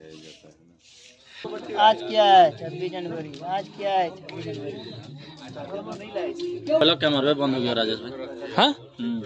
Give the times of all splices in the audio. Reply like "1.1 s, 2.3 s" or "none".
1.5 s, 6.8 s